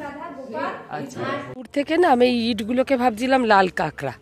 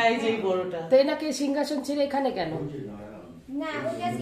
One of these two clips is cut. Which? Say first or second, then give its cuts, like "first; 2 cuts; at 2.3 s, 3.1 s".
first; 1 cut; at 1.5 s